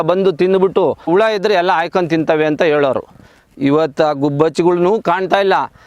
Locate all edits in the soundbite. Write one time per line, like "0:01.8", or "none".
0:01.1

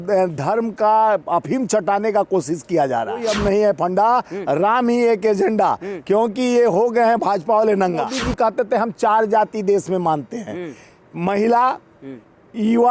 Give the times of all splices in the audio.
0:03.2
0:08.1

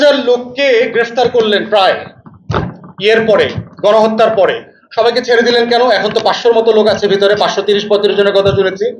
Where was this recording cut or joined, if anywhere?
none

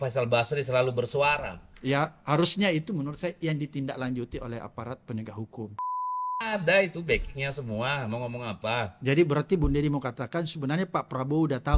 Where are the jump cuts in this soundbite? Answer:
0:06.1

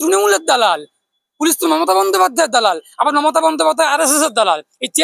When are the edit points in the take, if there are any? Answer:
none

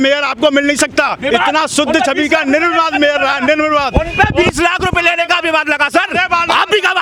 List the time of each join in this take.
none

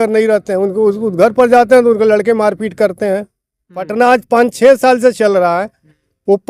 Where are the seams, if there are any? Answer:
0:03.9

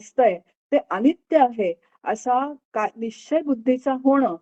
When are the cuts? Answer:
none

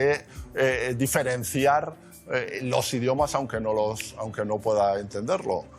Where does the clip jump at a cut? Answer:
none

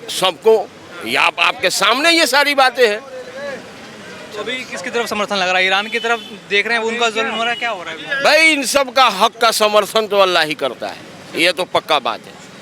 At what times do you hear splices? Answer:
none

